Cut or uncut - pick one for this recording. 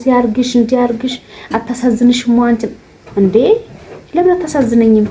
uncut